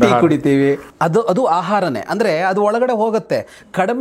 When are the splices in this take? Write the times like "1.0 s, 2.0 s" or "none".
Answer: none